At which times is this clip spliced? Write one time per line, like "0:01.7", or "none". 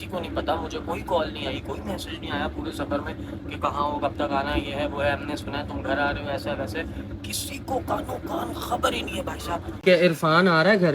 0:09.8